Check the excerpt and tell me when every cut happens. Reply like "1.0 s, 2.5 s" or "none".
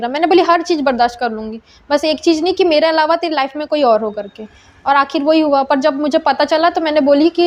none